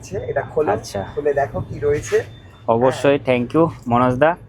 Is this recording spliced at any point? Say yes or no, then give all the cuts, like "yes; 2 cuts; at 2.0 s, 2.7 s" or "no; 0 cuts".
no; 0 cuts